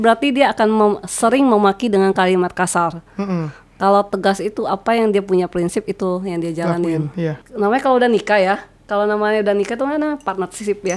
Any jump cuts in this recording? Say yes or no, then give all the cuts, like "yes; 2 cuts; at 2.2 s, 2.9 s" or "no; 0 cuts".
yes; 1 cut; at 7.4 s